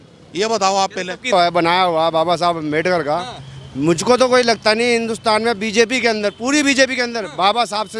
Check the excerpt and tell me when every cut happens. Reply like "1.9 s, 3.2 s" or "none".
1.3 s